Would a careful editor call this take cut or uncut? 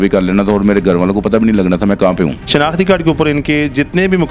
cut